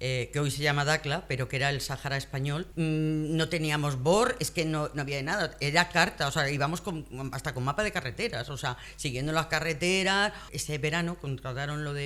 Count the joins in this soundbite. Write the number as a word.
two